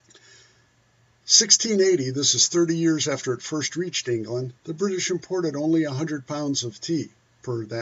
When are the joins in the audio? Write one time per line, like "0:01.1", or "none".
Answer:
0:04.6